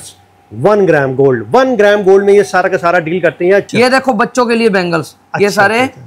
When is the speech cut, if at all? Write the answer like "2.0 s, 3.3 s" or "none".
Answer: 3.7 s